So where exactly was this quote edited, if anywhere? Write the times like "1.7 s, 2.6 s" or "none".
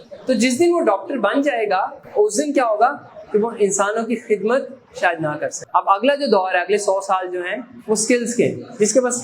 2.0 s, 5.6 s

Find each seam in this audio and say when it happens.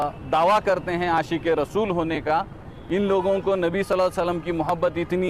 none

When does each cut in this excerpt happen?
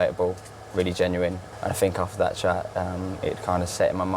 1.4 s

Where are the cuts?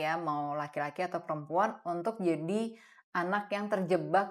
none

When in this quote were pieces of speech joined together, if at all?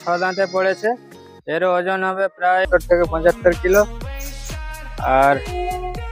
2.7 s

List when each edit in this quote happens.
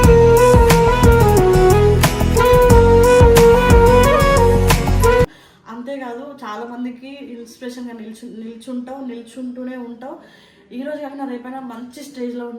none

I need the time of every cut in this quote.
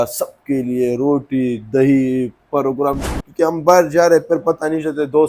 3.2 s

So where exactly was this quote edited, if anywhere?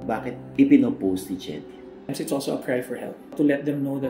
2.1 s, 3.3 s

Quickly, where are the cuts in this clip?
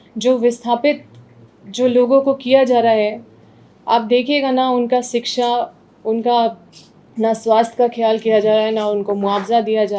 none

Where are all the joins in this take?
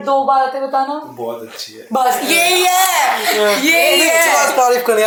none

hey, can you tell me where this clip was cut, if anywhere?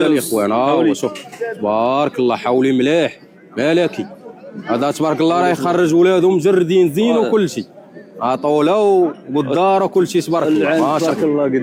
none

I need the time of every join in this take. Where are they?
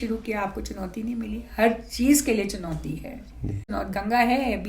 3.7 s

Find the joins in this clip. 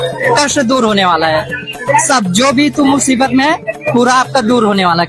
none

